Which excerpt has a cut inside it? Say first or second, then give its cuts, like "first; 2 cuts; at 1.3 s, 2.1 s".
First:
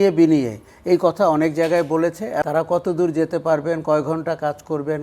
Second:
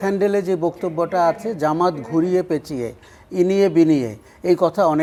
first; 1 cut; at 2.4 s